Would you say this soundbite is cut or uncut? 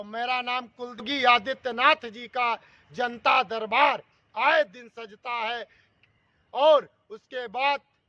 cut